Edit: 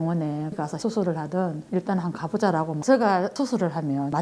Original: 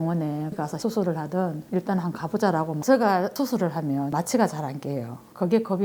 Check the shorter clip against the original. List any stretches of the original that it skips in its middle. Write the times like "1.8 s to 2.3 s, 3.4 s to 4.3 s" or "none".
none